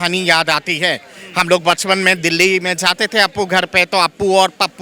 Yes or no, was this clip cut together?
no